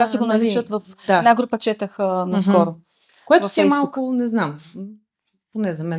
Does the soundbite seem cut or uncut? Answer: uncut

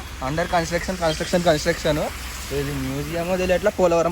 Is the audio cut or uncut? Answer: uncut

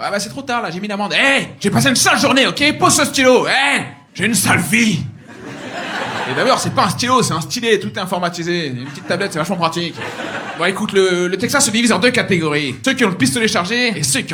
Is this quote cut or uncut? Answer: uncut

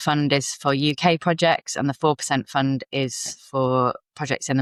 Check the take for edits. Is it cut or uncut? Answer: uncut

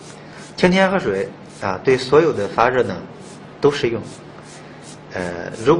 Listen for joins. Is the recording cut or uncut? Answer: cut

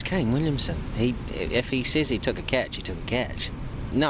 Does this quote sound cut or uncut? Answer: uncut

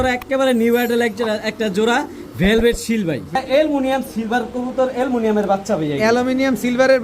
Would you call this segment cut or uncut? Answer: cut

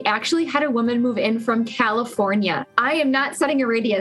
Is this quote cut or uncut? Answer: cut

